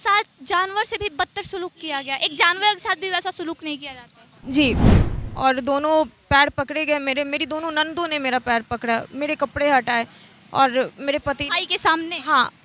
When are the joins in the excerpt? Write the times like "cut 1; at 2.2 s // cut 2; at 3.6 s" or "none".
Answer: cut 1; at 4.8 s